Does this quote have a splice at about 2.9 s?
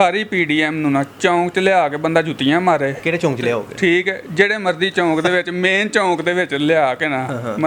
no; 0 cuts

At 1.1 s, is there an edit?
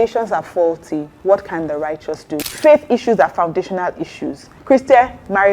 yes; 3 cuts; at 1.1 s, 2.4 s, 4.5 s

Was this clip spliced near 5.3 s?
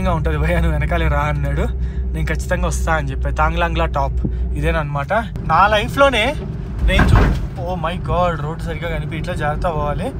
yes; 1 cut; at 5.3 s

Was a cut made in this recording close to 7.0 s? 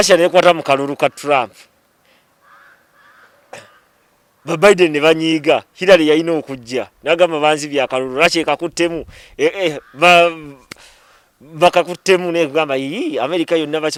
no; 0 cuts

